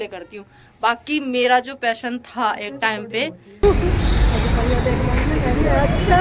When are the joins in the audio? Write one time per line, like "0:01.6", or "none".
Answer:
0:03.6

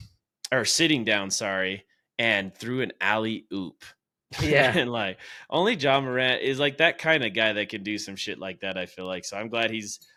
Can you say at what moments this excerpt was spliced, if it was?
none

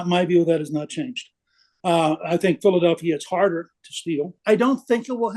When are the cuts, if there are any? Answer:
0:04.4

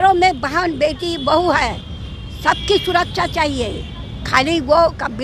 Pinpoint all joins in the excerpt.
none

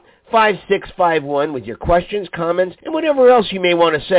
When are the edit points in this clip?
0:02.8

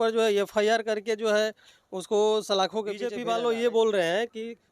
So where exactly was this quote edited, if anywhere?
0:03.2

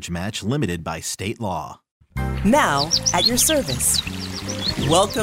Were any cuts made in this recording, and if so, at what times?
0:02.2

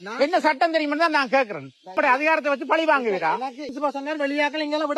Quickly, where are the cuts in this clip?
0:01.9
0:03.7

